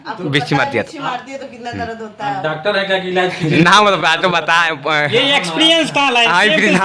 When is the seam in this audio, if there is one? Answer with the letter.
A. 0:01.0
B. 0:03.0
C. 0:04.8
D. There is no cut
D